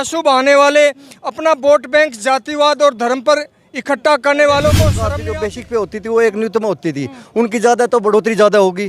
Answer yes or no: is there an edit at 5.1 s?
yes